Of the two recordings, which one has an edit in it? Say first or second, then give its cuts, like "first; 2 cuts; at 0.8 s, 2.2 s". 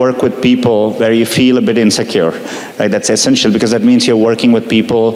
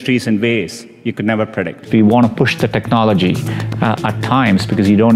second; 1 cut; at 1.9 s